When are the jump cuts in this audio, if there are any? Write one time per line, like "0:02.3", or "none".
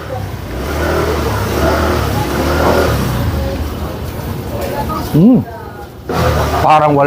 0:06.2

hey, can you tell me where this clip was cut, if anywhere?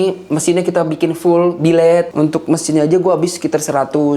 0:02.1

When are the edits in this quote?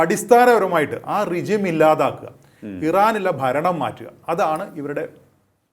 none

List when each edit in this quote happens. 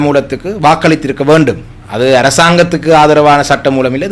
none

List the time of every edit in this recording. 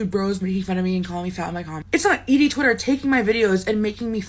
0:02.2

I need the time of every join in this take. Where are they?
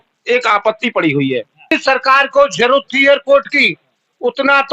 0:01.7

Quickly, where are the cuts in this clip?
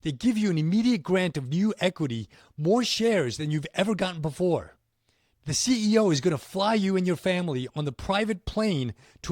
0:05.0

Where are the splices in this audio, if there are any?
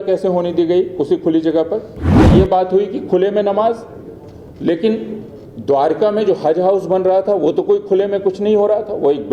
0:02.2

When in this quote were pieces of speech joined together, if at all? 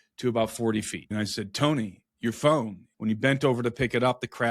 0:01.1
0:02.8

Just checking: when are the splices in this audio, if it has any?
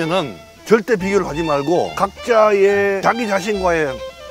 0:01.9
0:03.0

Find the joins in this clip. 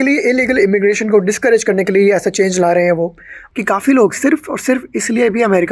0:03.4

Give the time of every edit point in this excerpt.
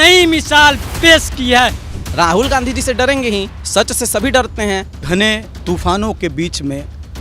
0:01.8
0:03.6
0:05.0

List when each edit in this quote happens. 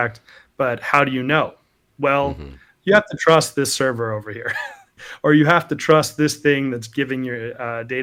none

